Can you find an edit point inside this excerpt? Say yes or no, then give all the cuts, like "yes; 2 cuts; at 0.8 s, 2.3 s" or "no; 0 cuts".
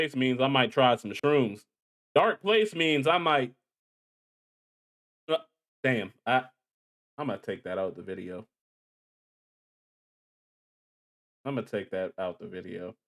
no; 0 cuts